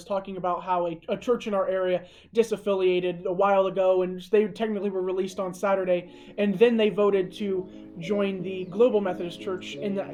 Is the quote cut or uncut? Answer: uncut